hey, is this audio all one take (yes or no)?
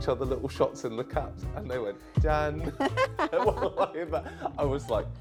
yes